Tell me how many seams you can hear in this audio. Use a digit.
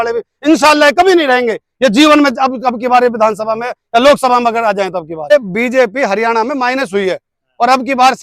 1